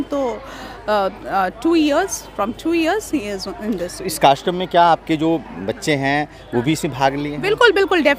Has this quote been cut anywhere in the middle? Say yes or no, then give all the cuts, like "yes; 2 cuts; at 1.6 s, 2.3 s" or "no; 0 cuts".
no; 0 cuts